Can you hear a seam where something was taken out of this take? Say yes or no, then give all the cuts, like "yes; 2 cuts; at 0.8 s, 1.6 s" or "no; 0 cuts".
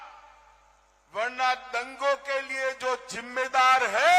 no; 0 cuts